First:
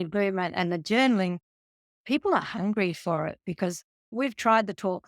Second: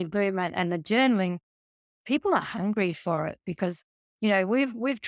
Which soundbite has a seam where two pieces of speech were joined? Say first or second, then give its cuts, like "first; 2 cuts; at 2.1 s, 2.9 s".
first; 1 cut; at 4.1 s